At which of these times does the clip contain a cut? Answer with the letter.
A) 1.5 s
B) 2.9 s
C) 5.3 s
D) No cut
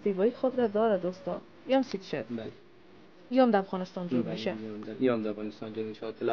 A